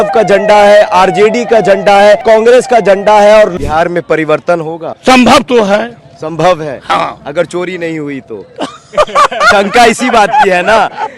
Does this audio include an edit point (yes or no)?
yes